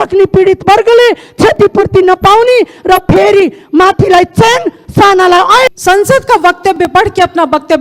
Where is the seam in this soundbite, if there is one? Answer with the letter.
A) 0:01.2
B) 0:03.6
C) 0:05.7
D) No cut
C